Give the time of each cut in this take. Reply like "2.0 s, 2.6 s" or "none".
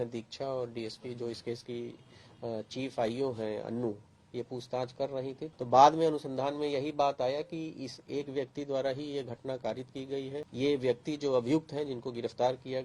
5.5 s, 10.4 s